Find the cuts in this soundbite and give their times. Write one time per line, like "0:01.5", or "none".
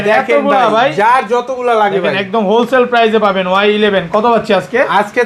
none